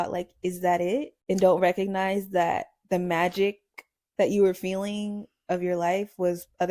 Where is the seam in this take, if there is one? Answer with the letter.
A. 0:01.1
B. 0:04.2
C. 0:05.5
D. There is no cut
A